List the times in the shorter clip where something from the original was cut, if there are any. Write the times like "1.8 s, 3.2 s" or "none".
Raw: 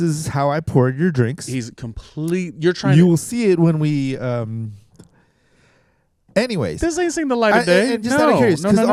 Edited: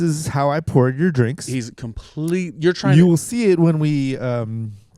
none